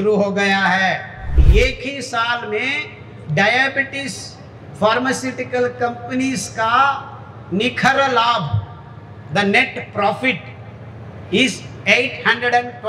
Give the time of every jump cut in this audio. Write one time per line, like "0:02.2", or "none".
0:01.4